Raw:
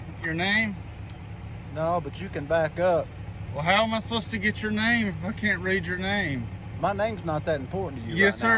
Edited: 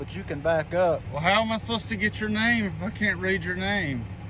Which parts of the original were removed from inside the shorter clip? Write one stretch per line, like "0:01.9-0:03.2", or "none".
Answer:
0:03.1-0:03.5